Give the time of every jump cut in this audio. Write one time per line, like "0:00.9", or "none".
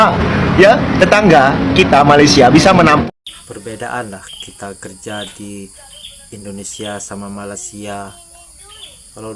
0:03.0

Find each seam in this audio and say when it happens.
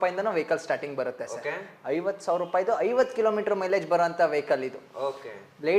none

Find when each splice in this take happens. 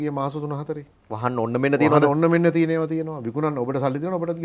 none

